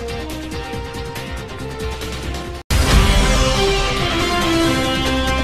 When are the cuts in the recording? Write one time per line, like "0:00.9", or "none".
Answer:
none